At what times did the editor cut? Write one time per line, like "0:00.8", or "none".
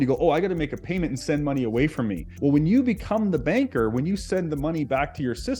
0:02.3